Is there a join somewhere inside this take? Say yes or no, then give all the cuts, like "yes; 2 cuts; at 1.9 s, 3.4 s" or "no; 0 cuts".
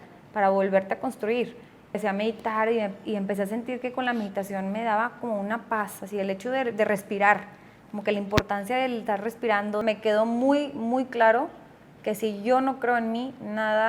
yes; 2 cuts; at 2.0 s, 9.8 s